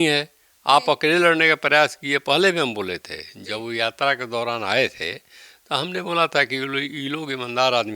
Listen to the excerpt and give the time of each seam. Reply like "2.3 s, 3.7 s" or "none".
none